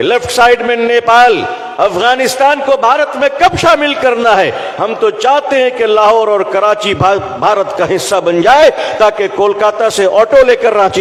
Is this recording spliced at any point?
no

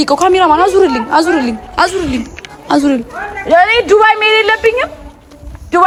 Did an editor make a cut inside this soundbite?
no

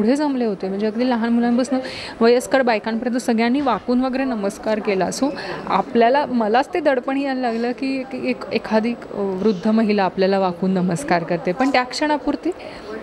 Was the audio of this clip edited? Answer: no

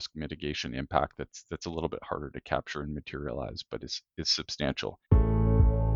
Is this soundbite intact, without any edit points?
no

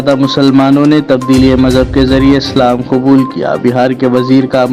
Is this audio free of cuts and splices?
yes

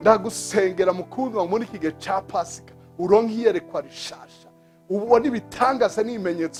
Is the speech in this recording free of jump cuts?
yes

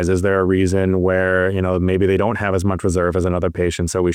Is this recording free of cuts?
yes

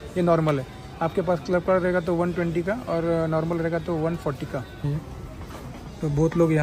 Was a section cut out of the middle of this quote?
yes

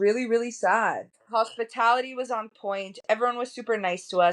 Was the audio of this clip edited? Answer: yes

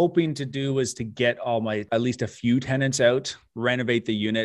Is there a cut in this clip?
yes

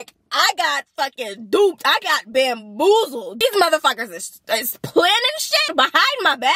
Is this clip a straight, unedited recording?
yes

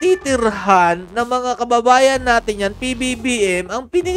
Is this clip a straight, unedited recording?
yes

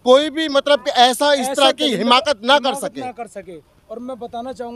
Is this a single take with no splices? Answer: yes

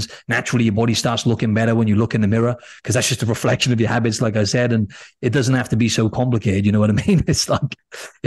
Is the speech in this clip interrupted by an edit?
no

